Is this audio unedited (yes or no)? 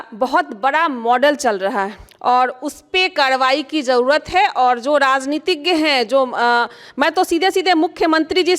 no